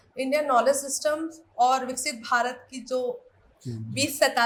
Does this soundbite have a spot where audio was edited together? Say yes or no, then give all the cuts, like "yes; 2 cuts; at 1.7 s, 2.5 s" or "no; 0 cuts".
no; 0 cuts